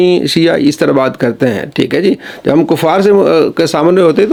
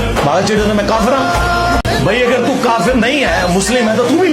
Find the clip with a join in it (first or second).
second